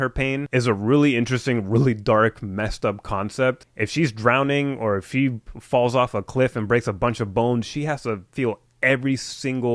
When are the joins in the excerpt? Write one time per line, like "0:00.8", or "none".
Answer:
0:03.7